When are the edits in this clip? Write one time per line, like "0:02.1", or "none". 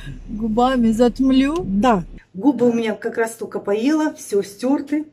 0:02.1